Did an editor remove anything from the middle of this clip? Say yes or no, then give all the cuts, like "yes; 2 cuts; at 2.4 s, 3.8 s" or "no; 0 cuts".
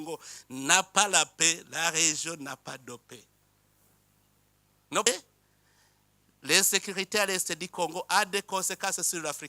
yes; 1 cut; at 5.1 s